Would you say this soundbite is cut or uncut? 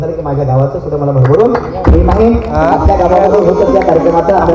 uncut